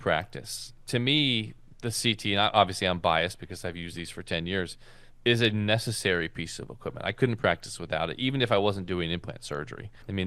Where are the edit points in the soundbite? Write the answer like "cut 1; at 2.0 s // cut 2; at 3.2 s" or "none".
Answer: none

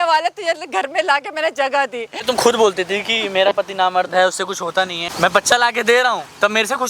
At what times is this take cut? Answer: cut 1; at 2.2 s // cut 2; at 5.0 s

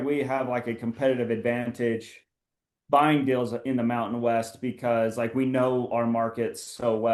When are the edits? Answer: none

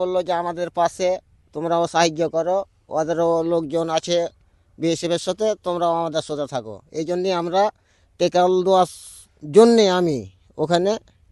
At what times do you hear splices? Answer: none

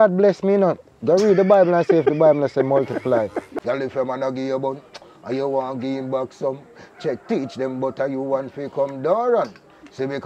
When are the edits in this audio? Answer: cut 1; at 3.5 s

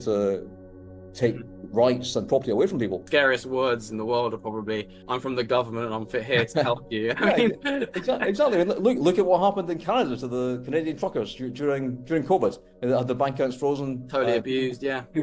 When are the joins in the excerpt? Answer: cut 1; at 3.0 s

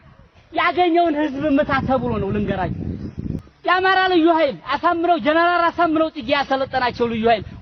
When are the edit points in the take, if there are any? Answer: cut 1; at 3.4 s

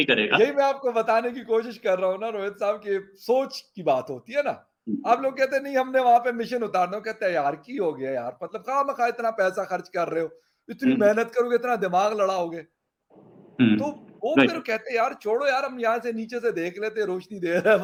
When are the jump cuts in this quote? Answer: none

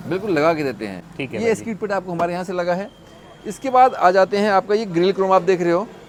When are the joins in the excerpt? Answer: none

